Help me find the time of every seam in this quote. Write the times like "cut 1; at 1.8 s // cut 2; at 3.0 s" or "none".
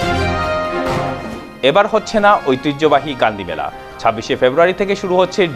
cut 1; at 1.2 s